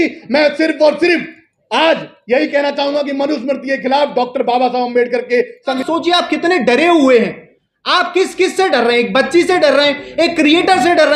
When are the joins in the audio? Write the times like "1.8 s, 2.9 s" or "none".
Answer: 5.7 s